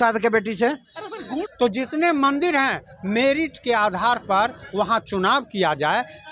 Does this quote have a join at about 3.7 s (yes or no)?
no